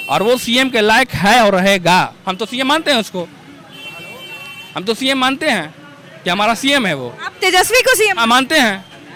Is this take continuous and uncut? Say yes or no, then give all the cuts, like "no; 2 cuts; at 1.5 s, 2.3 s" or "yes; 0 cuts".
yes; 0 cuts